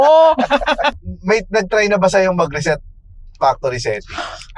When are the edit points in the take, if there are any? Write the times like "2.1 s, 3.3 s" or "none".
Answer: 0.9 s